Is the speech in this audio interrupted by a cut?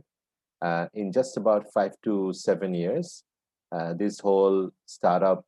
no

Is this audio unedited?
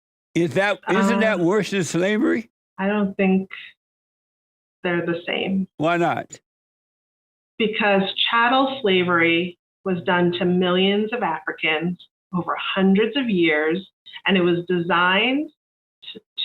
no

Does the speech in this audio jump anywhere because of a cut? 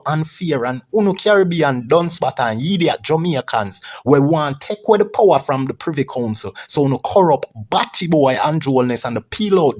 no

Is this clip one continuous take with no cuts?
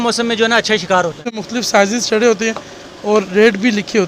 no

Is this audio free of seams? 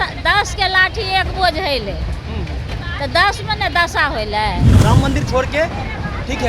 no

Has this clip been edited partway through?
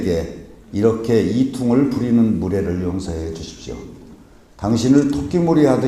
yes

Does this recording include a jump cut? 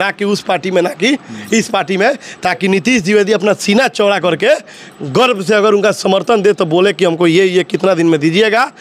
no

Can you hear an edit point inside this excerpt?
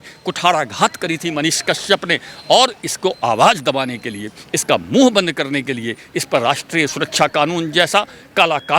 no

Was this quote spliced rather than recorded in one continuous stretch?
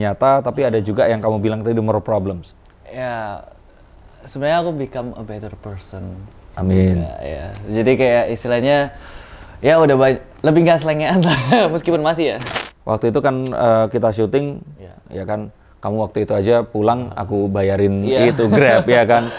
yes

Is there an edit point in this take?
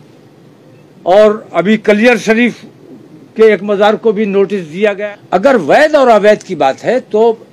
yes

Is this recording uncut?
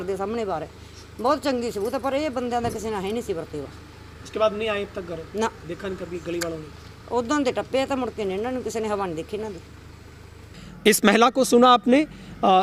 yes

